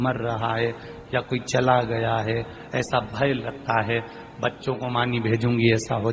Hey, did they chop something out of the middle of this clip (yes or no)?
no